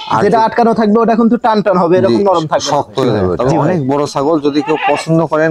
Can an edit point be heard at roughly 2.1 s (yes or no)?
no